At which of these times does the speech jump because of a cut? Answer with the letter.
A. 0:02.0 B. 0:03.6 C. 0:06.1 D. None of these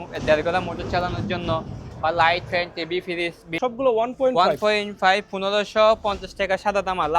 B